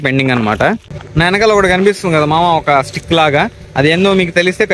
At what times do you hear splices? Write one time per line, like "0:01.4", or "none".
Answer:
0:00.9